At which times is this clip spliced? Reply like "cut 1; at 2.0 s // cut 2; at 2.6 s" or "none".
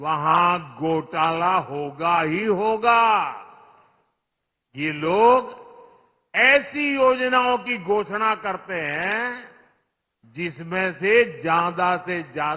none